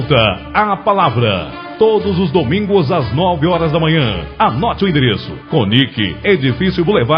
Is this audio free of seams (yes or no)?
no